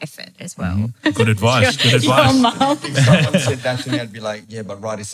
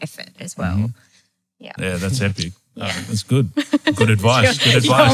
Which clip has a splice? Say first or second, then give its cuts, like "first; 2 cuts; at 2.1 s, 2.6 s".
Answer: first; 1 cut; at 1.0 s